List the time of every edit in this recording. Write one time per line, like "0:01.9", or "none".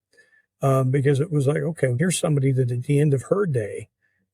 0:02.0